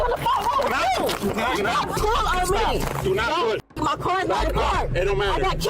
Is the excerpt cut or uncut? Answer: cut